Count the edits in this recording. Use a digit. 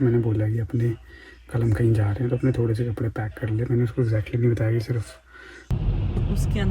1